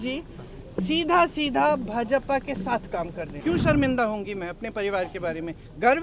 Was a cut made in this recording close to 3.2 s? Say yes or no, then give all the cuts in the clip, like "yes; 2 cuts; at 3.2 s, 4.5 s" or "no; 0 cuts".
yes; 1 cut; at 3.2 s